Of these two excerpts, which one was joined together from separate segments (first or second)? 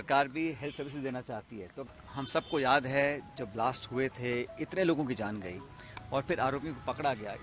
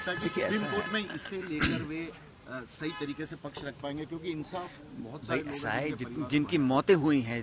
first